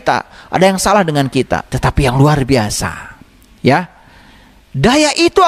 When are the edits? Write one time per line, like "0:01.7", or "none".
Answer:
0:01.7